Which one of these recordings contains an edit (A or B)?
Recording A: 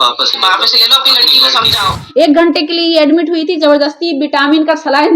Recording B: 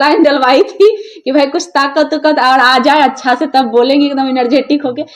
A